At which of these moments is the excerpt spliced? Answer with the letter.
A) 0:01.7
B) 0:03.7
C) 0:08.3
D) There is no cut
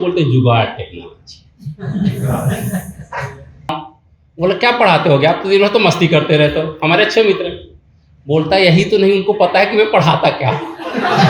B